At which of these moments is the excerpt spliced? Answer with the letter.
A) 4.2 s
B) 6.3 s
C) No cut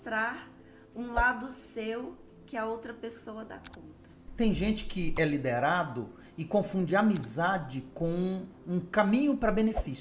A